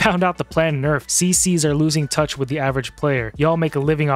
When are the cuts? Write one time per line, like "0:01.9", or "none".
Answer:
0:01.1